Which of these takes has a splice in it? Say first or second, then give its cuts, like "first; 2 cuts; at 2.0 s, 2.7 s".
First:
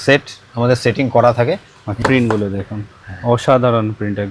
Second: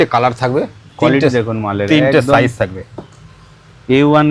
first; 1 cut; at 2.0 s